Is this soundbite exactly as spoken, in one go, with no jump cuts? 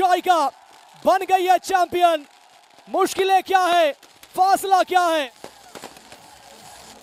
yes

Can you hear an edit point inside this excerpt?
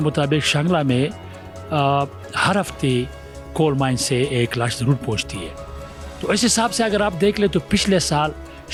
no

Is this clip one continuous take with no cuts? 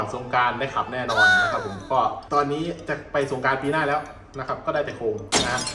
yes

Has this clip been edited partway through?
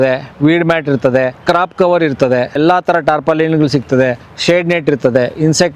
yes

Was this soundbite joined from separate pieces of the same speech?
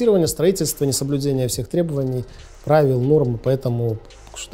no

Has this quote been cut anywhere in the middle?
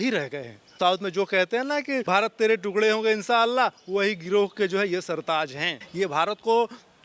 yes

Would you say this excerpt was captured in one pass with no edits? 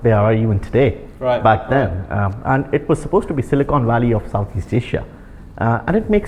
yes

